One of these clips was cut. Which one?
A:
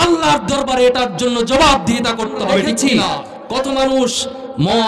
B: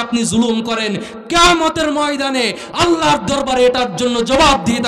A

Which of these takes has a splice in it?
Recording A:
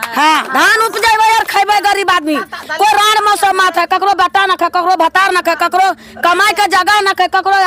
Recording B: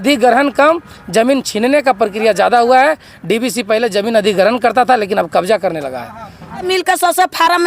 B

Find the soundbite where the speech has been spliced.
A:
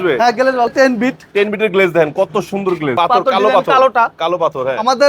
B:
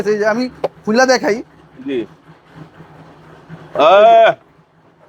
A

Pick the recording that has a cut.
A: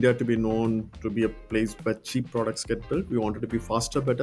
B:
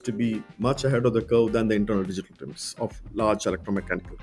A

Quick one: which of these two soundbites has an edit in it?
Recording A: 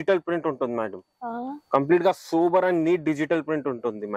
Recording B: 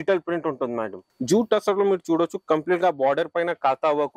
B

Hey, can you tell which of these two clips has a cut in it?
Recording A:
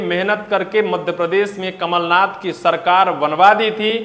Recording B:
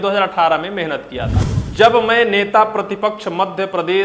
B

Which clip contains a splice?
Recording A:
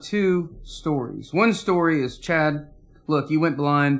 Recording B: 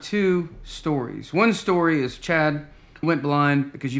B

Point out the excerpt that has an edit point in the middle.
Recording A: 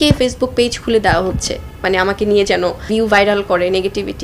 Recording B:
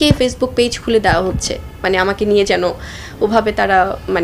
A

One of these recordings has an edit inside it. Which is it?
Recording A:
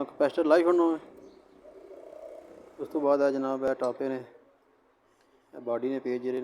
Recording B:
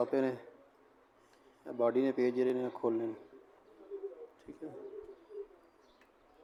A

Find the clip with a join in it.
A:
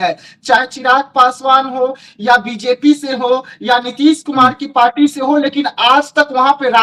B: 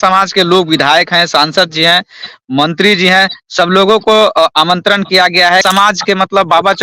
B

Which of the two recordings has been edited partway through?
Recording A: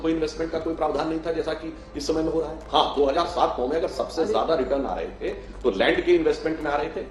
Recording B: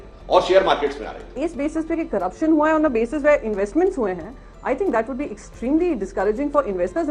B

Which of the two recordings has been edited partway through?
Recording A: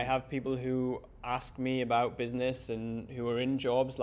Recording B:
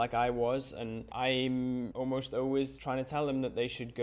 B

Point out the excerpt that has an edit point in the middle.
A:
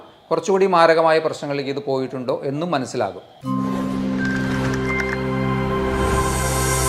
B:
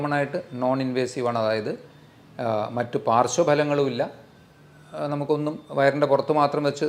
A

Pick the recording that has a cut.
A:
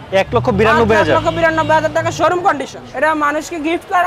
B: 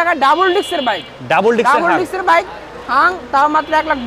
A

